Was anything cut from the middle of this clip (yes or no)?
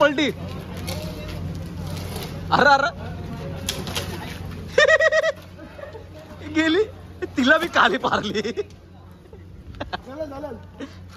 no